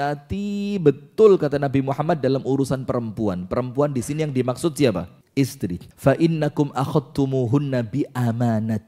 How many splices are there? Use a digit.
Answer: 1